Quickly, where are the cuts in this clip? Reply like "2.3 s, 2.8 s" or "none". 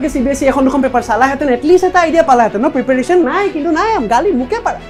none